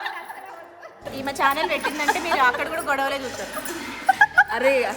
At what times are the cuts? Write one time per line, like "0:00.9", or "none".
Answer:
0:01.0